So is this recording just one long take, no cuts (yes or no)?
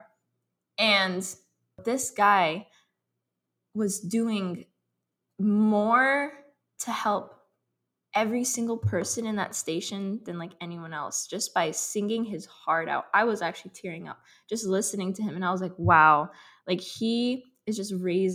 no